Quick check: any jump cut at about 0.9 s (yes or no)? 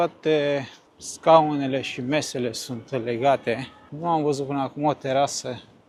no